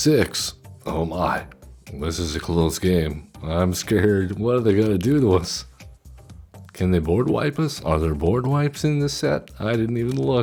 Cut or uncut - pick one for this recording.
uncut